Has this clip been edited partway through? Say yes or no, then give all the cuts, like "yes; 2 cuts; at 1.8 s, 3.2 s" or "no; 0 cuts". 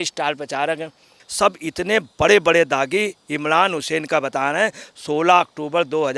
yes; 1 cut; at 1.2 s